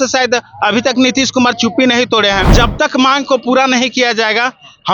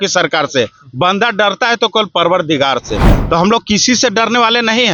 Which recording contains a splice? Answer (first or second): first